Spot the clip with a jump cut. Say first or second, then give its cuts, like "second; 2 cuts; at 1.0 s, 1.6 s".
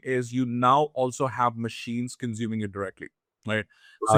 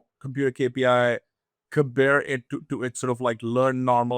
second; 1 cut; at 2.5 s